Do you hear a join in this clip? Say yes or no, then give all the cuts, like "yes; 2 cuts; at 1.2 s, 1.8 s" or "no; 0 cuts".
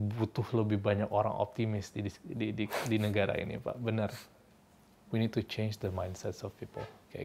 yes; 1 cut; at 4.4 s